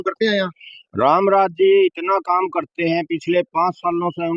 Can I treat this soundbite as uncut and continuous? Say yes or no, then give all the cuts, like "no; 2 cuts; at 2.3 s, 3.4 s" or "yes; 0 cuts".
yes; 0 cuts